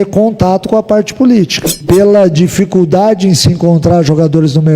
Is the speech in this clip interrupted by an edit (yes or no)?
yes